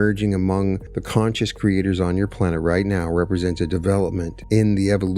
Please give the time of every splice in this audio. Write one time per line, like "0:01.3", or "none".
0:00.9
0:04.3